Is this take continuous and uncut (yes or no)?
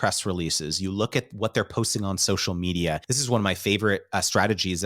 no